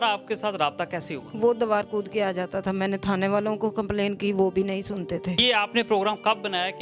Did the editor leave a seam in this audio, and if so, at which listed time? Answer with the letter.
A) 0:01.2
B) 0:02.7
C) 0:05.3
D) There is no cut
C